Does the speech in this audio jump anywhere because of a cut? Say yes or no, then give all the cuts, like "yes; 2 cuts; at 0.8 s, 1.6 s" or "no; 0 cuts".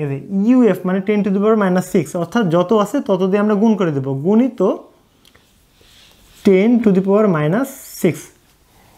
no; 0 cuts